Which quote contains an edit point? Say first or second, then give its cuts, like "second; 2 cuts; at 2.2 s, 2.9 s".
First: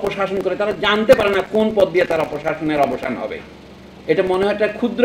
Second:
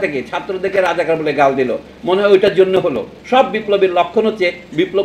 second; 1 cut; at 3.1 s